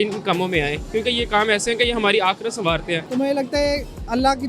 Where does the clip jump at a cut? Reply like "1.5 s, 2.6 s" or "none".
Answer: 3.0 s